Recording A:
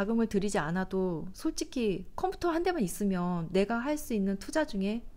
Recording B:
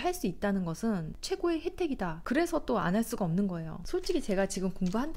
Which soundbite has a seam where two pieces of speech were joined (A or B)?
B